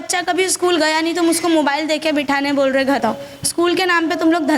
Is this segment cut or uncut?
cut